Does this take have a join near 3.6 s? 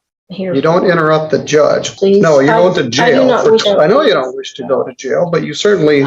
yes; 2 cuts; at 1.9 s, 3.6 s

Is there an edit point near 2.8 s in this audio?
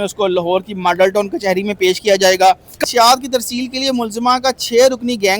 yes; 1 cut; at 2.8 s

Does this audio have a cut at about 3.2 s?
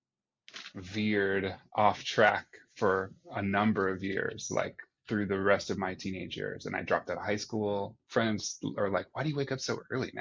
no; 1 cut; at 8.0 s

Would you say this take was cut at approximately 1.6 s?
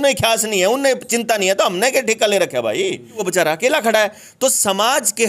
no; 1 cut; at 3.2 s

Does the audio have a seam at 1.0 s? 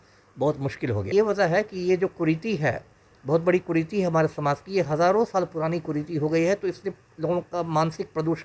yes; 1 cut; at 1.0 s

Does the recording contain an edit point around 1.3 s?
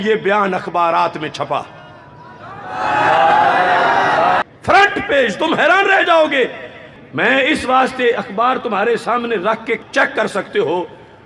no; 1 cut; at 4.4 s

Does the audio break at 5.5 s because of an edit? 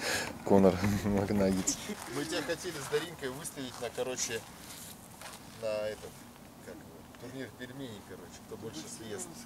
no; 1 cut; at 2.0 s

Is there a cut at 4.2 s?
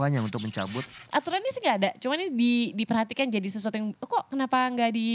no; 1 cut; at 1.0 s

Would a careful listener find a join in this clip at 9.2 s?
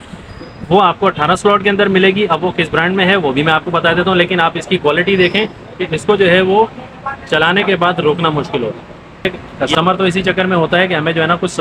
yes; 1 cut; at 9.2 s

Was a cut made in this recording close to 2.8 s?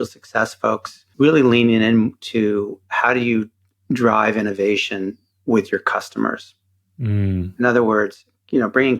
no; 1 cut; at 1.0 s

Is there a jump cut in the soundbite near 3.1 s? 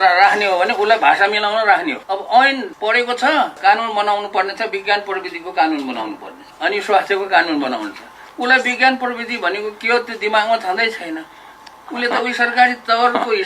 yes; 3 cuts; at 2.0 s, 3.1 s, 6.5 s

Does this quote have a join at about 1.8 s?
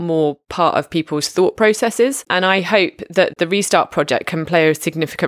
no; 0 cuts

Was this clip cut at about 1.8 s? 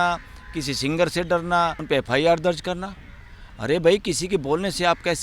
yes; 1 cut; at 1.8 s

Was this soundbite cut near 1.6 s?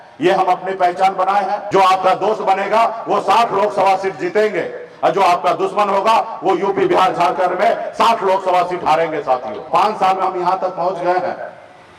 yes; 2 cuts; at 1.6 s, 9.7 s

